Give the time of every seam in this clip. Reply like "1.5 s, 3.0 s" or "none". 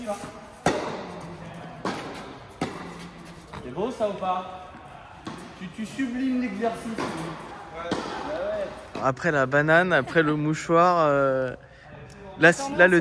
3.5 s, 9.0 s